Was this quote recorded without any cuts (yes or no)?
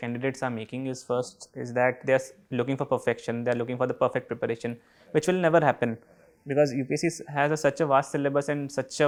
yes